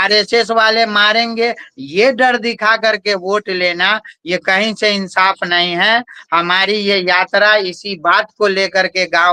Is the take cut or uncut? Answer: uncut